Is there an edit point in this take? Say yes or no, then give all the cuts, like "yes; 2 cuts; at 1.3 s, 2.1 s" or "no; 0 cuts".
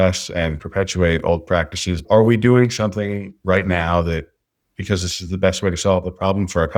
yes; 1 cut; at 2.0 s